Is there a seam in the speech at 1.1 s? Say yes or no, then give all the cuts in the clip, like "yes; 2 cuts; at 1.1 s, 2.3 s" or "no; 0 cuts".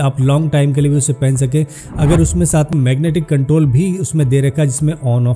no; 1 cut; at 2.7 s